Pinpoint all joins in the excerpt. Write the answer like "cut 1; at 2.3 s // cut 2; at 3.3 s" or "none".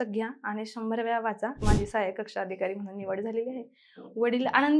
cut 1; at 1.6 s